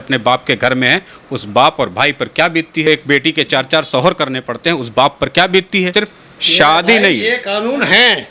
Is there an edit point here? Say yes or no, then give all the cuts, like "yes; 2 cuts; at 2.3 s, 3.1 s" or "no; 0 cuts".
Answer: yes; 2 cuts; at 2.9 s, 5.9 s